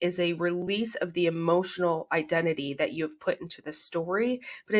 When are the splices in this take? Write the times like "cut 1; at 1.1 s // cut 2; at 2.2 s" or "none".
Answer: none